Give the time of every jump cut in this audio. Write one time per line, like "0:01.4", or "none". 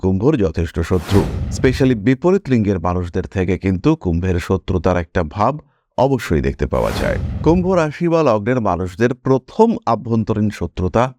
0:01.4
0:07.3